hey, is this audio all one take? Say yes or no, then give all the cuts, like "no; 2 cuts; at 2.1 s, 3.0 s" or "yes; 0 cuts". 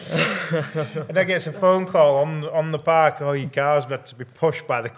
yes; 0 cuts